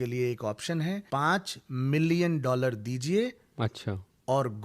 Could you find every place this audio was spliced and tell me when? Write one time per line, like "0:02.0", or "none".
0:01.0

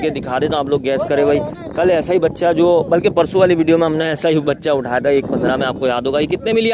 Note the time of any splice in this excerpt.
none

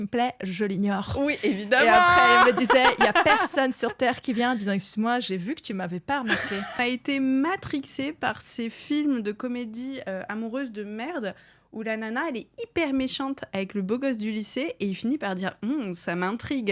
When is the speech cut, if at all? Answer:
0:06.8

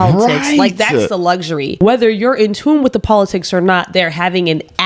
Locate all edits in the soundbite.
0:01.7

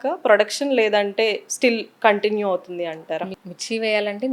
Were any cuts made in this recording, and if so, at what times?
0:03.4

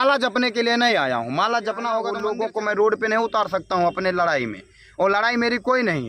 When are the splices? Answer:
0:02.1

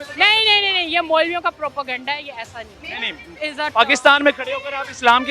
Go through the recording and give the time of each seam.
0:03.4

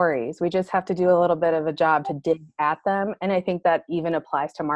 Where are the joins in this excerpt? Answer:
none

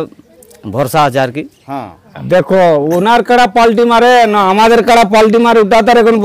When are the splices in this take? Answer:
0:02.1

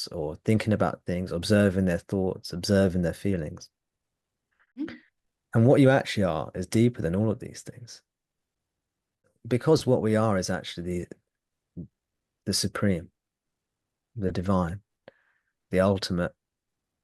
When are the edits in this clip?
0:04.8
0:09.3

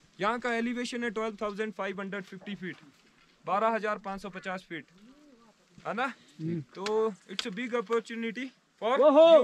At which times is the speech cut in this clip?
none

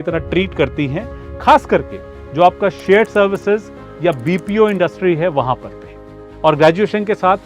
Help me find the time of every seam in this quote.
0:06.2

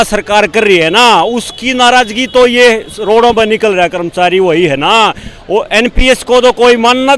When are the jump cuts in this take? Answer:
none

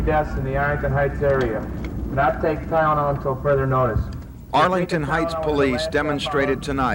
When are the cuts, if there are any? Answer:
none

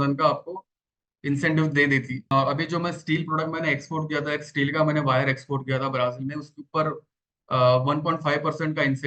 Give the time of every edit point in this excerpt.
0:02.2

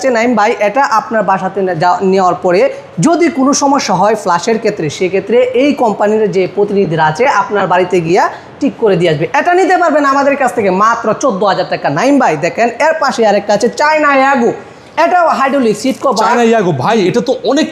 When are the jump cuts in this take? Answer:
none

